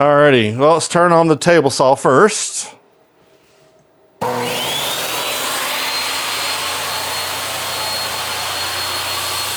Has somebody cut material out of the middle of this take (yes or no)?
no